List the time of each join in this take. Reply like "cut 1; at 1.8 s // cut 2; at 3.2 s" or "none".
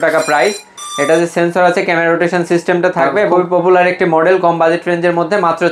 cut 1; at 3.3 s